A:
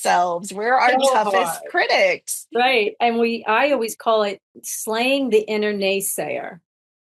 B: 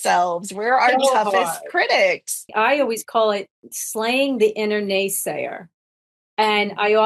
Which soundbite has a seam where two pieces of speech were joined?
B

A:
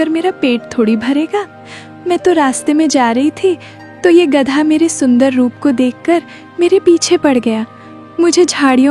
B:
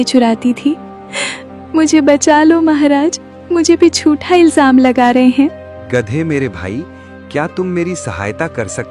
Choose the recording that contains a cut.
B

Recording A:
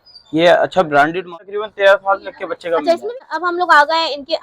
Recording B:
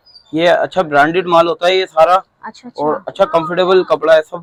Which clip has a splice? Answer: A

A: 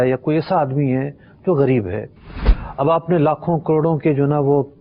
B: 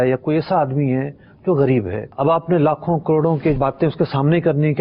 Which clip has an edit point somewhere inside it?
B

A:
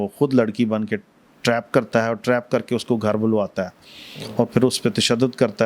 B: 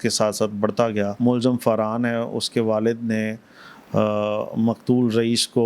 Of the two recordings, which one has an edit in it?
B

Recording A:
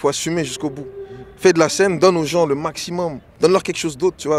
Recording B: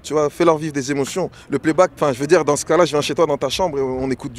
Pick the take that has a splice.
A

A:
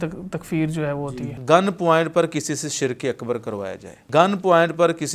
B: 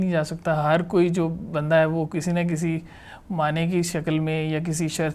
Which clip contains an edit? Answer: A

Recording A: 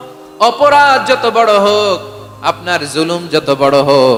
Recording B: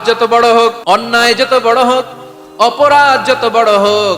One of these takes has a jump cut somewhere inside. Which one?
B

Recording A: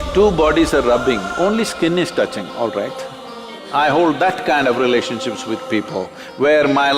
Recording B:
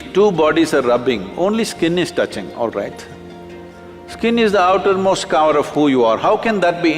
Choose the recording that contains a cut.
A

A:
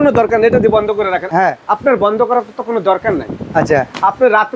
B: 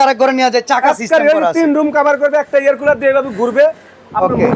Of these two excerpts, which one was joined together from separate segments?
A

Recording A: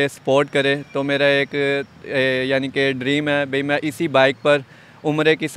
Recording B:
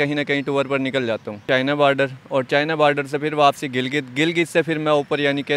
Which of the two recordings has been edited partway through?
B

